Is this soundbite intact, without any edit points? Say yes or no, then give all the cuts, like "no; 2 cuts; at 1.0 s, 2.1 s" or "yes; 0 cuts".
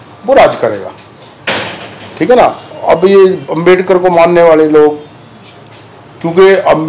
yes; 0 cuts